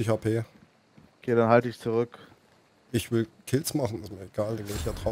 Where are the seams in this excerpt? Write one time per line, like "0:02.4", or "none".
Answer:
none